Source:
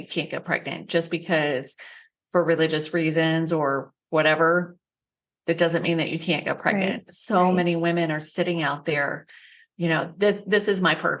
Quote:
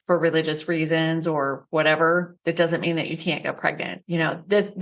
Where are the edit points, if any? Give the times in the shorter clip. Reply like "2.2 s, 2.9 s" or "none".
1.6 s, 2.3 s, 3.7 s